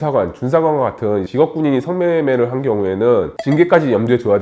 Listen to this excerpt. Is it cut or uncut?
uncut